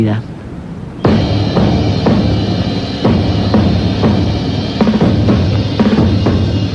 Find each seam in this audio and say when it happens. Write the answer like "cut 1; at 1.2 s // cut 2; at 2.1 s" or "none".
none

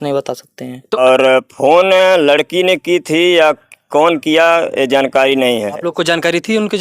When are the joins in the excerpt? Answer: cut 1; at 1.0 s

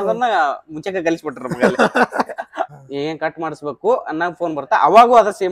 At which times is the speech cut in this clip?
cut 1; at 2.7 s

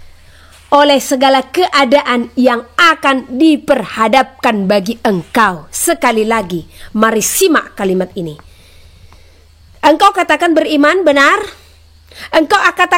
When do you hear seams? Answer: none

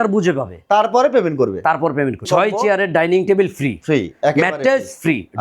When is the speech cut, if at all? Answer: cut 1; at 2.2 s

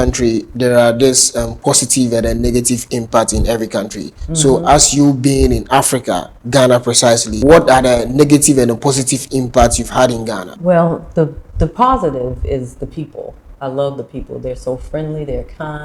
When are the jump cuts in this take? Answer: cut 1; at 7.3 s // cut 2; at 10.5 s

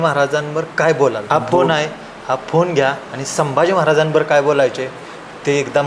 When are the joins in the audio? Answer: cut 1; at 1.2 s

